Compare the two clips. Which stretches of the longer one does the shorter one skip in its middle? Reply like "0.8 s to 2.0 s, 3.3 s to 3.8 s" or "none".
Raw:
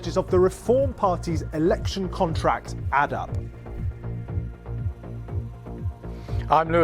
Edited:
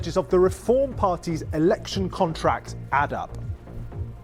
3.3 s to 4.6 s